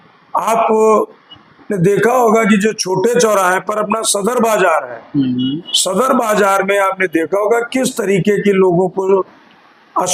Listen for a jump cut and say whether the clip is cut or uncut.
uncut